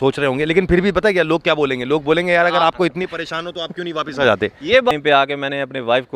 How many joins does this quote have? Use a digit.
1